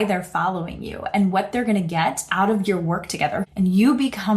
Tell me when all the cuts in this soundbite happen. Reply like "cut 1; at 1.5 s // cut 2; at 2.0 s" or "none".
cut 1; at 3.5 s